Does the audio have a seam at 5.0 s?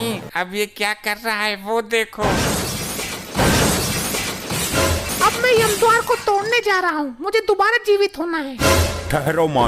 yes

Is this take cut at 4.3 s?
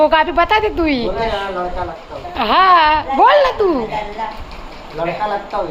no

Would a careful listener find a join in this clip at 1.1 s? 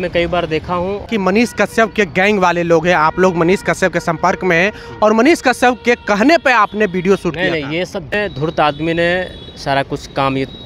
yes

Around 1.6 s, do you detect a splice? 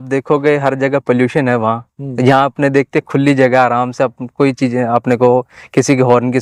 no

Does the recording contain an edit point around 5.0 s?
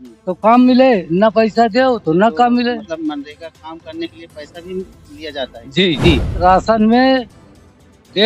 no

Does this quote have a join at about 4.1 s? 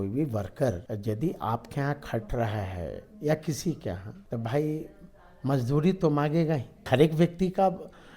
yes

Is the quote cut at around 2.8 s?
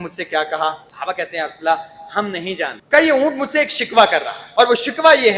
yes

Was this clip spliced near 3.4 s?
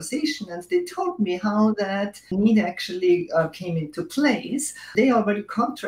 no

